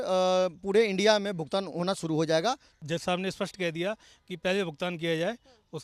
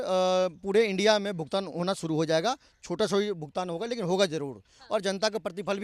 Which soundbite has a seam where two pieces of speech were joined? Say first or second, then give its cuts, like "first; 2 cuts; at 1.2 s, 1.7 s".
first; 1 cut; at 2.7 s